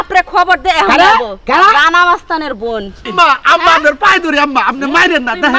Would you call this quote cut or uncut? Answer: cut